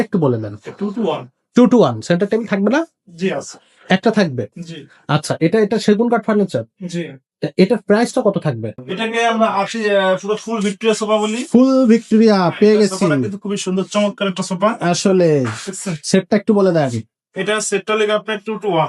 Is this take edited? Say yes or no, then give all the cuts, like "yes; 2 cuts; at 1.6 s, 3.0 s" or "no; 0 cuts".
yes; 1 cut; at 8.8 s